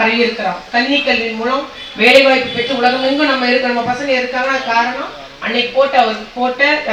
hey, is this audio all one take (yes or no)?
yes